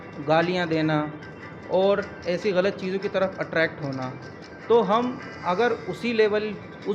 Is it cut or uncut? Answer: uncut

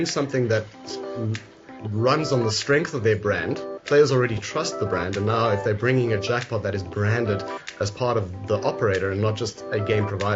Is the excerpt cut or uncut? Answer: uncut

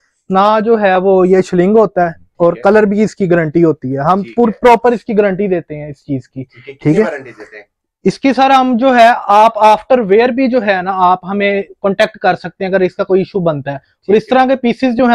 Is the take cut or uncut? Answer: uncut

